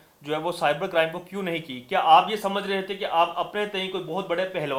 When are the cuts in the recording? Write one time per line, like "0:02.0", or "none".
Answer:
none